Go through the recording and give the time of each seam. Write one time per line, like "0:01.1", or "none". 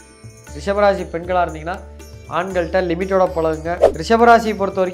0:03.9